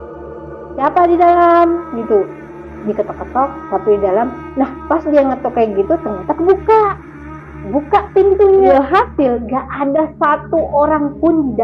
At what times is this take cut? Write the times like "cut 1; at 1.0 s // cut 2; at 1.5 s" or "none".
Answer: cut 1; at 8.7 s